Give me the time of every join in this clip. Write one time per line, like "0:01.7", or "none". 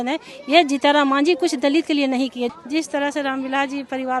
0:02.5